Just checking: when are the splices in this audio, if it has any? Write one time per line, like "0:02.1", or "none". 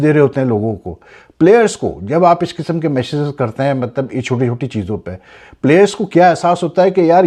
none